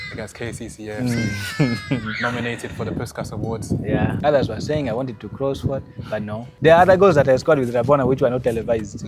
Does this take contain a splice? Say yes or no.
yes